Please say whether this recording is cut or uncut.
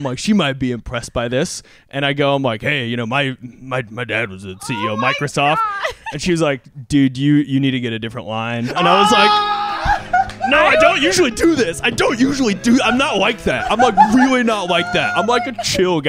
uncut